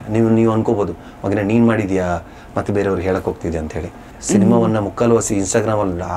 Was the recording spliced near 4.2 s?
yes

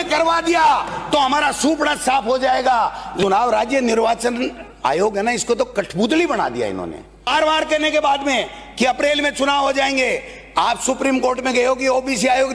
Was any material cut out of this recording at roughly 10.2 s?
no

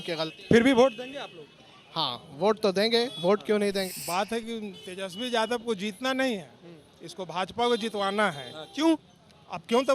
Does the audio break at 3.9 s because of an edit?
yes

